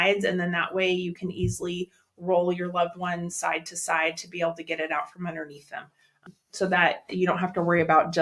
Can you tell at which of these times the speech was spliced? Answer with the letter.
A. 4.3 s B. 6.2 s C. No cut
B